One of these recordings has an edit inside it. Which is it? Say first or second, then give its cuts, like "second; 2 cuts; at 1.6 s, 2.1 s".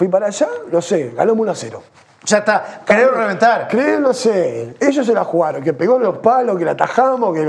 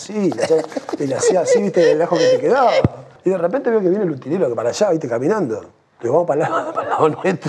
second; 1 cut; at 3.1 s